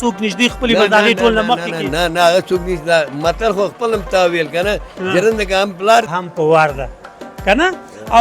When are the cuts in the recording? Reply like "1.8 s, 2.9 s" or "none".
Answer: 6.1 s